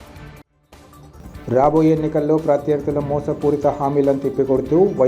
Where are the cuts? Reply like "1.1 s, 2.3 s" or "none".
1.0 s

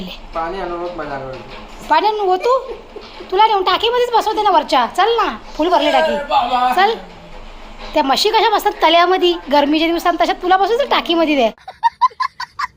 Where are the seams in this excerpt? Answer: 11.7 s

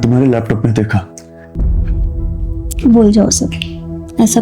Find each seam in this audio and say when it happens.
1.5 s

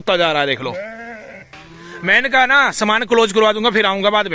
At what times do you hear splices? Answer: 1.5 s

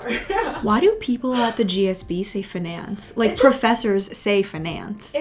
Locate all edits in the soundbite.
none

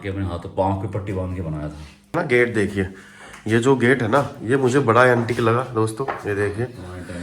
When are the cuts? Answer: 2.1 s

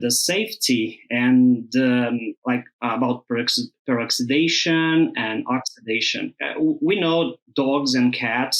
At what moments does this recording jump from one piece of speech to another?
6.4 s, 7.4 s

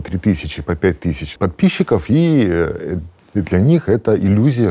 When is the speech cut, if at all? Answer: 1.3 s

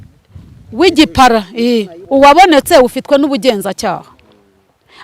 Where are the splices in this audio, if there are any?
2.0 s

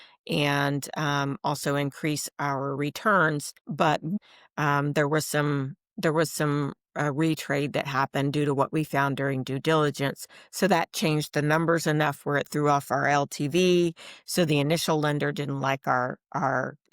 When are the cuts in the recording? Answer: 4.1 s

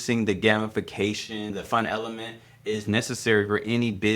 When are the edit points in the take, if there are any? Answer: 1.5 s

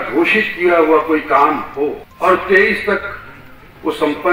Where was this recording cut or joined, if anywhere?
2.1 s

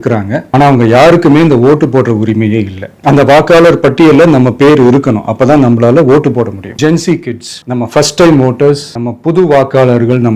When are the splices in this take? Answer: 2.9 s, 6.7 s

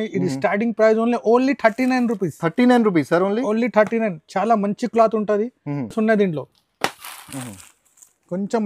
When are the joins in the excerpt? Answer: none

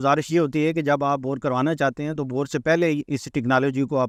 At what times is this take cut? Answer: none

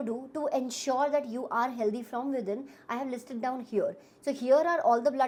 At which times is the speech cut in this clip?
none

